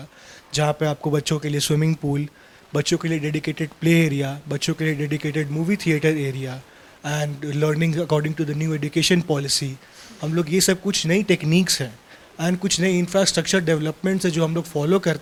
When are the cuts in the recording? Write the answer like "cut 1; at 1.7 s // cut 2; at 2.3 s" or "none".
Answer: none